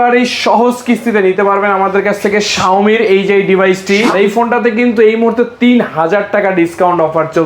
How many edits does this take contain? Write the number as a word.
one